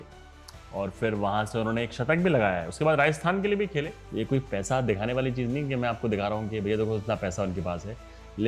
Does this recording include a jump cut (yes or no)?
yes